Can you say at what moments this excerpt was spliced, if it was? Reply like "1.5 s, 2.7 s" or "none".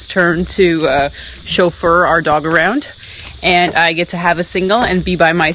none